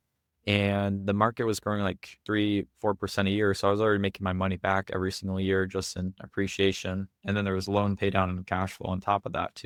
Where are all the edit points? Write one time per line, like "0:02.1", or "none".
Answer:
none